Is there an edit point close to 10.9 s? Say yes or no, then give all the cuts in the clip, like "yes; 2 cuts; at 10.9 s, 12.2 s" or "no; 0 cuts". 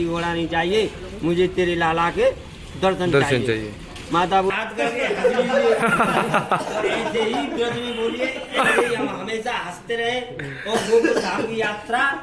no; 1 cut; at 4.5 s